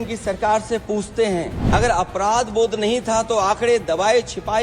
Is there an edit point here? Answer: yes; 1 cut; at 1.6 s

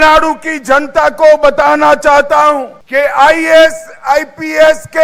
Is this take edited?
yes; 1 cut; at 2.8 s

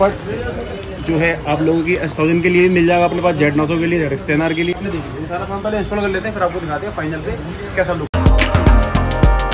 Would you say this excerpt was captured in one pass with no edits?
yes; 0 cuts

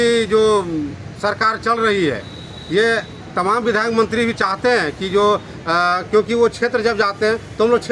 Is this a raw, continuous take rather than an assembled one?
yes; 0 cuts

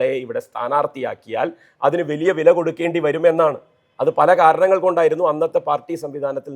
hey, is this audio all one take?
yes; 0 cuts

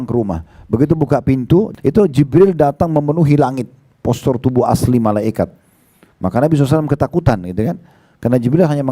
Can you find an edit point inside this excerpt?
yes; 1 cut; at 1.7 s

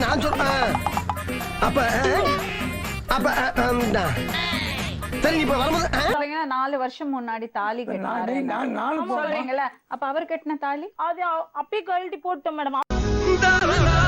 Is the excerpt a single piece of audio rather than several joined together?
no; 1 cut; at 6.1 s

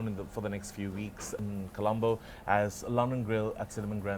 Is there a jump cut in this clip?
yes; 1 cut; at 1.4 s

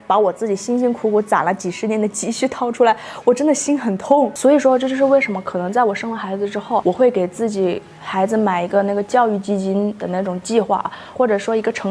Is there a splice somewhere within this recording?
no; 0 cuts

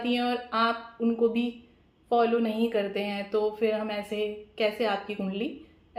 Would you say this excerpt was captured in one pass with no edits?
yes; 0 cuts

